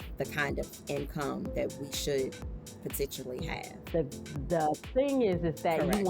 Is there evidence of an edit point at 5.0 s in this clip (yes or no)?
no